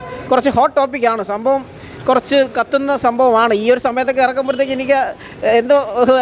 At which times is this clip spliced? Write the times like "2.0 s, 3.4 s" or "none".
none